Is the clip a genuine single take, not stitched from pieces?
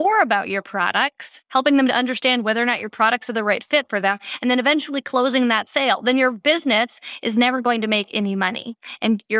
yes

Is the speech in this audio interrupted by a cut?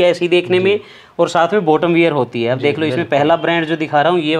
no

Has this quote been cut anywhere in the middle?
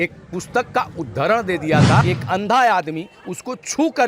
yes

